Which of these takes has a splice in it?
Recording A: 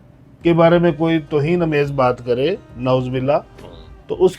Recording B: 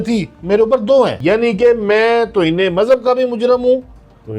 B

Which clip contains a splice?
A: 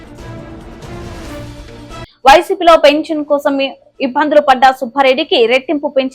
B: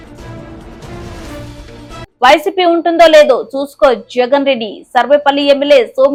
A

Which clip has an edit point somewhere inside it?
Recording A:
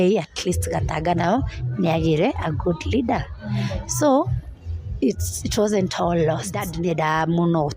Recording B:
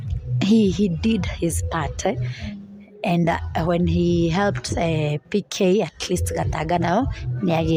A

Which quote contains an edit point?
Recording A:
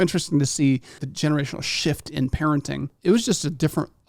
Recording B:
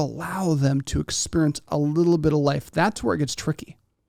A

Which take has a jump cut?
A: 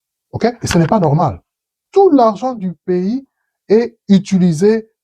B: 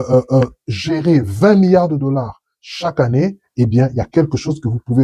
A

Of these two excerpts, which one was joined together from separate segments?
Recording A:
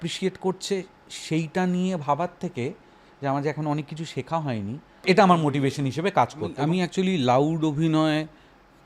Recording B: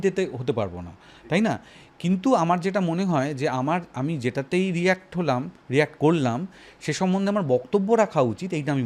A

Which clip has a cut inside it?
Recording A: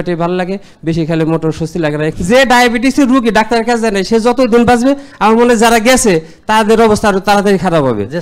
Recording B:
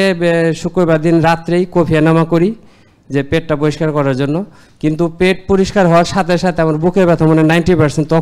A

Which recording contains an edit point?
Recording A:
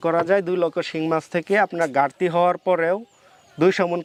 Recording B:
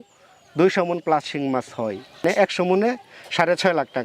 B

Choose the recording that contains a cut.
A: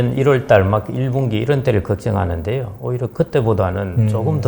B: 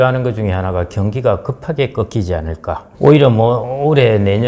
B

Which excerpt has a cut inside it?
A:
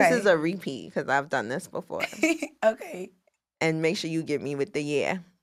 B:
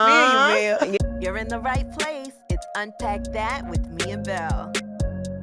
B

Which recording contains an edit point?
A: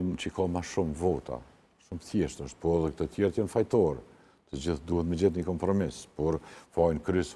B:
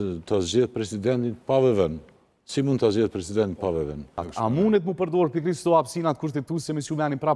B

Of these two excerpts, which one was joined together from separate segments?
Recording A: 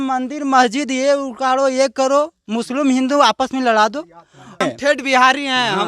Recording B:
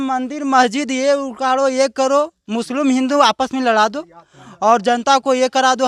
A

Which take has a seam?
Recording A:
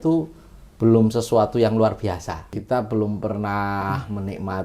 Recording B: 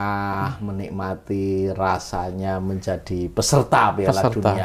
A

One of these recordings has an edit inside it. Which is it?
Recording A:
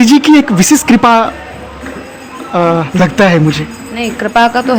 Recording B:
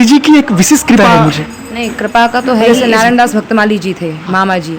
B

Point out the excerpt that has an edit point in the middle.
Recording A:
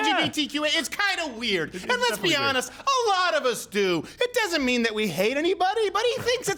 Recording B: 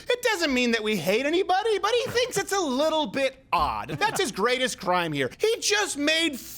B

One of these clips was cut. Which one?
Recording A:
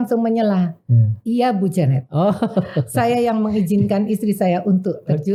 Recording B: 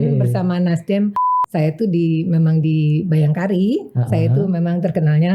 B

